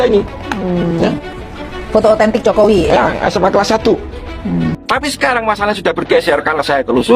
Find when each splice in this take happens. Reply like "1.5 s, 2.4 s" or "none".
4.8 s